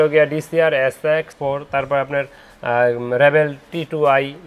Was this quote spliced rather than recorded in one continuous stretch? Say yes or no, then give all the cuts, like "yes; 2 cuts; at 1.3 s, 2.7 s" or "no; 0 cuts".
yes; 1 cut; at 1.3 s